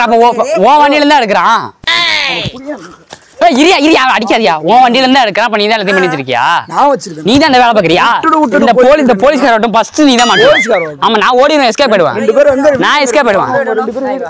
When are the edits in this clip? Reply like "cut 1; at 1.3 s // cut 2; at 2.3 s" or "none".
cut 1; at 13.4 s